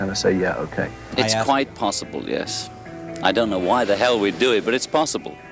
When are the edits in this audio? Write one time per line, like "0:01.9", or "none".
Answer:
0:01.0